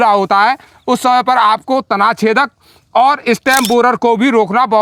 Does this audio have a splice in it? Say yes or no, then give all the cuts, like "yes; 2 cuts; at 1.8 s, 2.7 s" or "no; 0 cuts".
no; 0 cuts